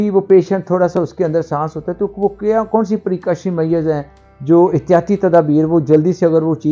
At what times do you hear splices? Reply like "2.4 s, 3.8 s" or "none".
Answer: none